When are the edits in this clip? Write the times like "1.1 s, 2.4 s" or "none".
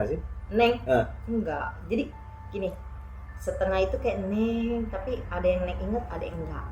none